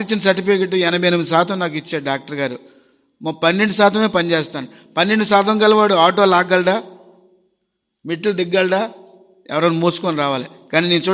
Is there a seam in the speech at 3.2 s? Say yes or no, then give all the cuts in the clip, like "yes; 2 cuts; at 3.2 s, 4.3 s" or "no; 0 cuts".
no; 0 cuts